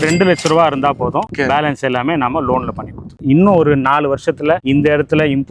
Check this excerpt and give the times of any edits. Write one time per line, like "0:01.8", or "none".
none